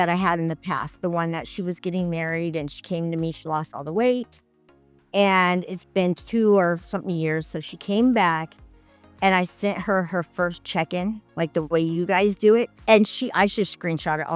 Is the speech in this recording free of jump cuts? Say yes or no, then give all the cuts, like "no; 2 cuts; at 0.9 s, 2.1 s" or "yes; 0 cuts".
yes; 0 cuts